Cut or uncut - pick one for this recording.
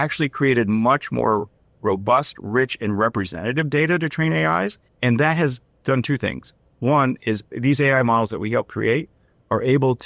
cut